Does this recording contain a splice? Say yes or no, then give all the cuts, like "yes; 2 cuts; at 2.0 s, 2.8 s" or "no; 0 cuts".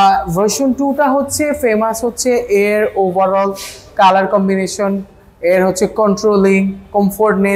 no; 0 cuts